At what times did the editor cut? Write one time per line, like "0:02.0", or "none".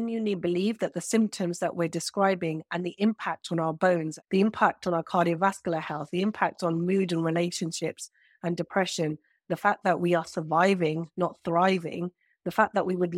0:04.2